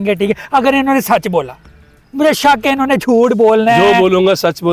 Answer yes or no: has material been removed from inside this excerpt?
no